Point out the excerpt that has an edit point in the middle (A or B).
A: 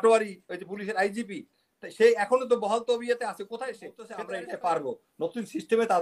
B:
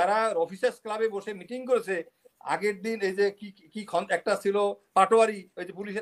A